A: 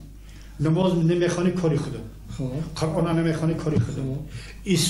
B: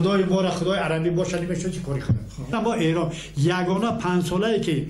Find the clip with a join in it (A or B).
B